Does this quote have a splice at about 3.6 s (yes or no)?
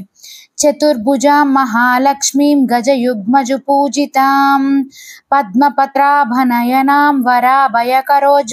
no